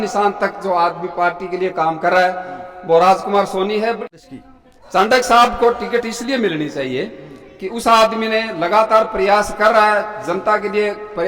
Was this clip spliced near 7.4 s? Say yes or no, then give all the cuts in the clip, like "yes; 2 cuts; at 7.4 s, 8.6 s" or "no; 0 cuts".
no; 1 cut; at 4.0 s